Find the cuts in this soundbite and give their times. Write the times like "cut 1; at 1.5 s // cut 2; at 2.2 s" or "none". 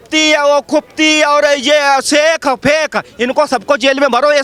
none